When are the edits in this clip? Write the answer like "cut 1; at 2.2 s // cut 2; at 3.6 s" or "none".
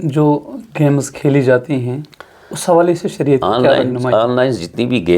none